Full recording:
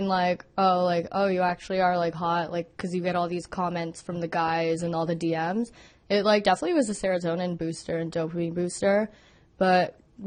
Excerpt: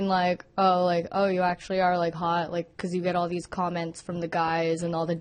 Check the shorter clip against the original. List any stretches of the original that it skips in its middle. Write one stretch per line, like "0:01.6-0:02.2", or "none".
none